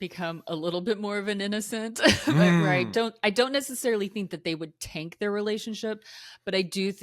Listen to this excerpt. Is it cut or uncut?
uncut